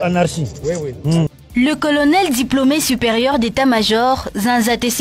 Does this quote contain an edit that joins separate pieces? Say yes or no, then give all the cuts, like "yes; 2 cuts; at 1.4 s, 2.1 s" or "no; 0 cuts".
yes; 1 cut; at 1.4 s